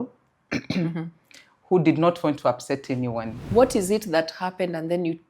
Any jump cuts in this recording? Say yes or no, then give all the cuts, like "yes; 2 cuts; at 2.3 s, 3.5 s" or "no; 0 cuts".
yes; 1 cut; at 3.4 s